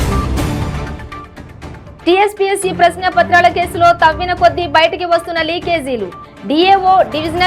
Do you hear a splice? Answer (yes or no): yes